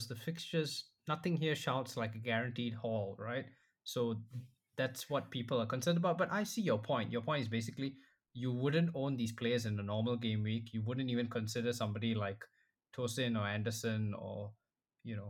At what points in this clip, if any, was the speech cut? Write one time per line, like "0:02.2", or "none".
none

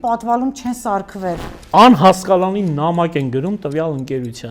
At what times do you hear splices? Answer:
0:01.5

